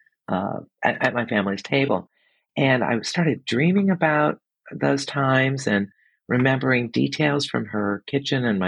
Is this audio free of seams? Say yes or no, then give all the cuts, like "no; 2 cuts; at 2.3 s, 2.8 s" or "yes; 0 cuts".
yes; 0 cuts